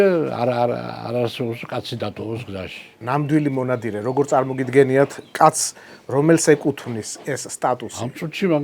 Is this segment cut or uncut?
uncut